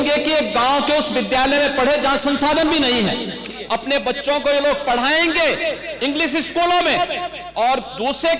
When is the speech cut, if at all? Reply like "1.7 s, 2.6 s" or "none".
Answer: 3.5 s